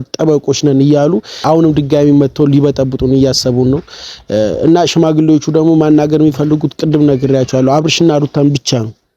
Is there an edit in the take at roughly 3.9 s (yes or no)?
no